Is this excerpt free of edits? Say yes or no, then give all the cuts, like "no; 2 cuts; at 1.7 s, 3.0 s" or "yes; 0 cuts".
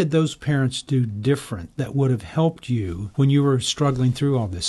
no; 1 cut; at 3.0 s